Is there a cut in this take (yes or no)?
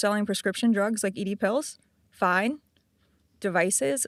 no